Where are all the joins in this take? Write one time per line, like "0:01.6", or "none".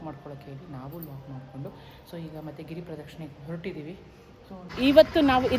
0:04.7